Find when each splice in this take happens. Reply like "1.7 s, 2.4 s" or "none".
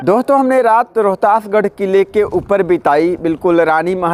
none